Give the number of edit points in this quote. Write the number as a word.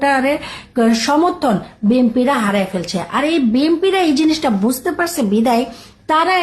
zero